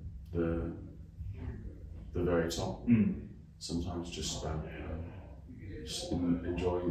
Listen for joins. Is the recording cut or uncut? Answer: uncut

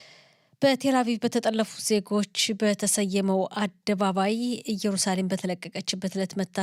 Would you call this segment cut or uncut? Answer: uncut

